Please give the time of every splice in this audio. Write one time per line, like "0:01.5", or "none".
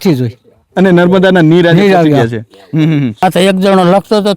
0:03.2

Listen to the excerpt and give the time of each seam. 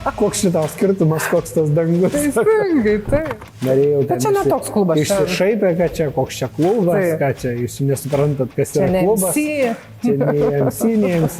0:03.3

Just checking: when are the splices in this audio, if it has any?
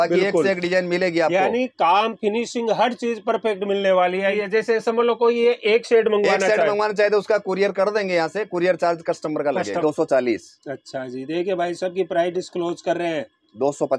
0:04.3
0:09.8

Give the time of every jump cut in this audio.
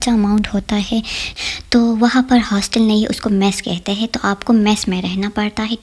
0:01.4

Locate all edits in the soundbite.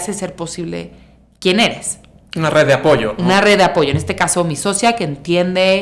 none

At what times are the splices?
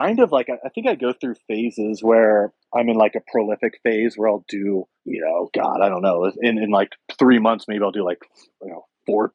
0:02.6
0:05.0

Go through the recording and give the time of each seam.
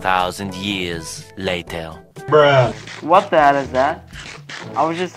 0:02.0
0:02.9

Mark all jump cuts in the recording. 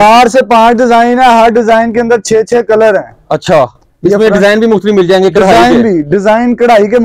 none

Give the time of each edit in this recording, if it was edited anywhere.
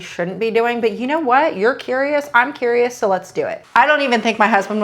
0:03.6

